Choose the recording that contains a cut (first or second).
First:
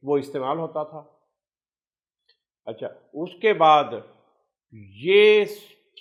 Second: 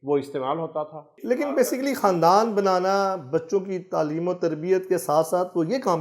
second